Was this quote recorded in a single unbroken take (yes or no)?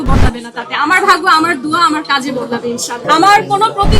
no